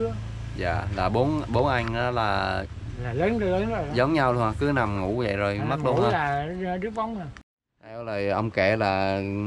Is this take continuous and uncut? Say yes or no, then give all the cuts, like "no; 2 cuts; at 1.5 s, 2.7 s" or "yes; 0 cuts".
no; 1 cut; at 7.6 s